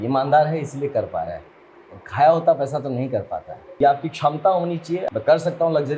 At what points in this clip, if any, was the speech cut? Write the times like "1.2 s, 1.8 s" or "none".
3.8 s, 5.0 s